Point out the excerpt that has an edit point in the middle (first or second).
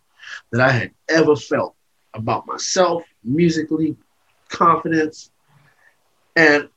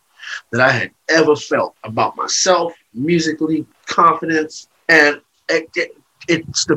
second